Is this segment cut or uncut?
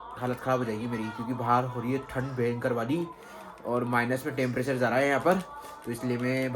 uncut